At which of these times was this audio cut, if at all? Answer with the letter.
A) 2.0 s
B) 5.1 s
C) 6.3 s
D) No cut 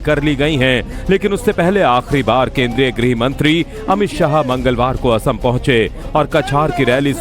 C